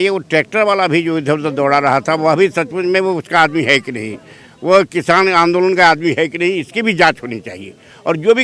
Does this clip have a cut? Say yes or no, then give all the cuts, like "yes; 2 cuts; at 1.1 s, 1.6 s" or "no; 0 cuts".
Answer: no; 0 cuts